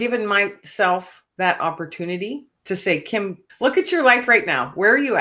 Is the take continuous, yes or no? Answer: no